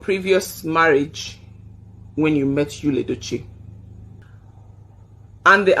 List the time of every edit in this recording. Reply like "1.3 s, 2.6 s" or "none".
4.2 s

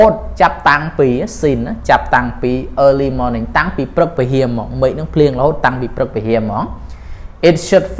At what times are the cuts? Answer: none

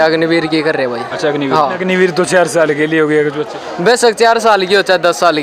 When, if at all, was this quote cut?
1.8 s

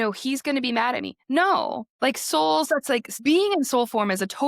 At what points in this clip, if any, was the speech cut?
3.1 s

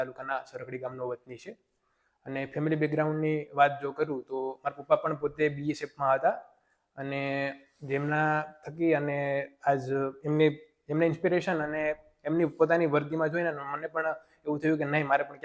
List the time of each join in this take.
none

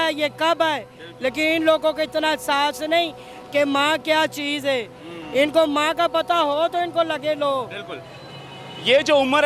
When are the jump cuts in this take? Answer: none

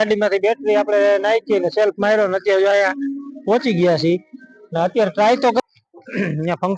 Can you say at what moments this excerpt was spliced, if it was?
5.6 s

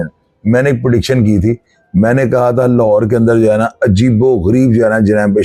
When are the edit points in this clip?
none

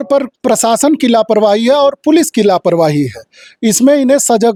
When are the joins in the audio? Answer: none

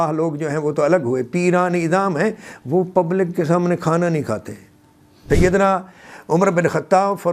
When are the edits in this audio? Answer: 5.2 s

